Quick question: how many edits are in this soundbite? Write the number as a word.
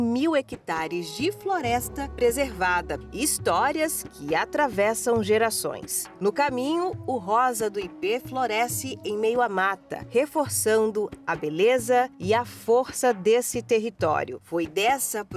zero